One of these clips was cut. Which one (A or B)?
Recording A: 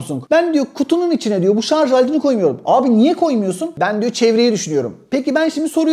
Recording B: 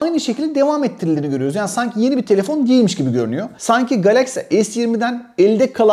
B